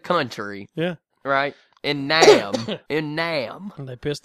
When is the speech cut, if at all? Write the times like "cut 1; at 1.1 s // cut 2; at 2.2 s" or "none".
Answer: cut 1; at 2.8 s